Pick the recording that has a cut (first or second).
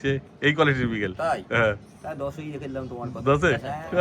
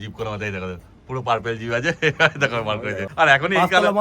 second